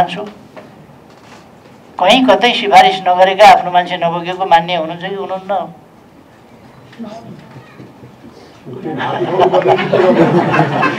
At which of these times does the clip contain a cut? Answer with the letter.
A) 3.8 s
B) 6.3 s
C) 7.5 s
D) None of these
D